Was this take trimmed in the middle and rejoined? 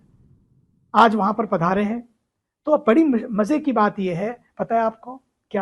no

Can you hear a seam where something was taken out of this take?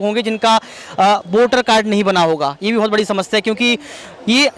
no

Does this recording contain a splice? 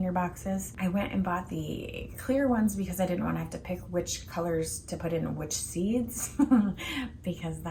no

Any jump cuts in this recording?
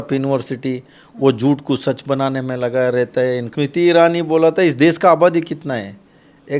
yes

